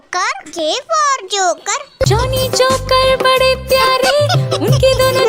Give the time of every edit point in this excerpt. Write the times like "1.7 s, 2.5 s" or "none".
none

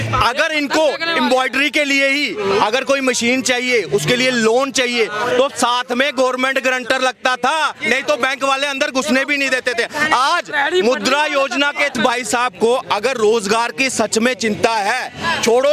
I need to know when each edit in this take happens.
11.9 s

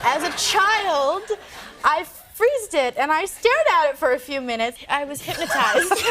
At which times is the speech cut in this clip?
4.7 s

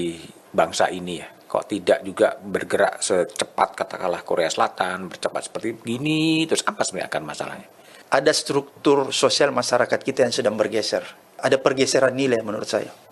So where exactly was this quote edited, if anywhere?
8.0 s, 11.4 s

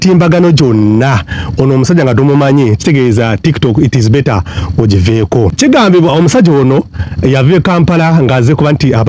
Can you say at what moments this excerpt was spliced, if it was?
5.5 s

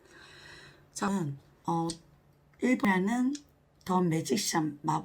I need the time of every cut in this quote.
1.1 s, 2.8 s

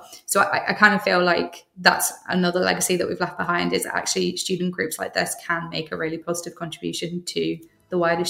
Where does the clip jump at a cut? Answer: none

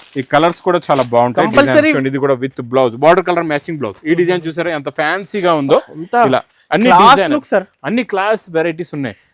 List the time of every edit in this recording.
2.0 s

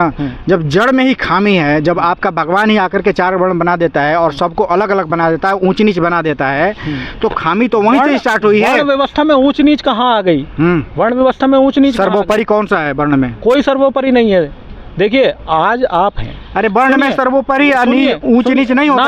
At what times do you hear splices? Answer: none

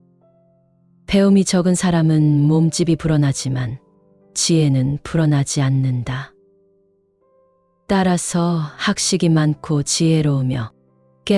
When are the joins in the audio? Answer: none

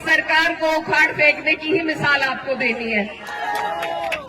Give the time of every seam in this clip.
3.3 s

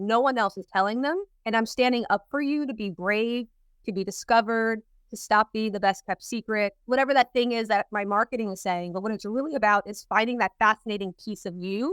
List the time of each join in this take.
1.3 s, 6.8 s

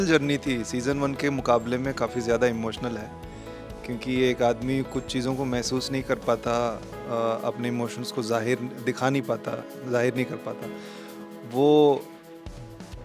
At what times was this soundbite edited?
none

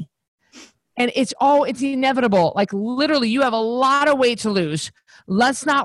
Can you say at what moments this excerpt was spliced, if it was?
none

